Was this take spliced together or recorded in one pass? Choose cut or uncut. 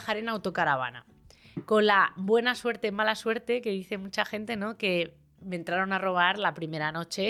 uncut